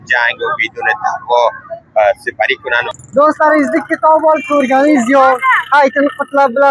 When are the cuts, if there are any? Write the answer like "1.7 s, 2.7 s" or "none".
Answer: 2.8 s